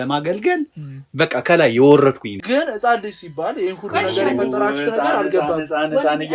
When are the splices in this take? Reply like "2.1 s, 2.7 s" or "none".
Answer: 2.4 s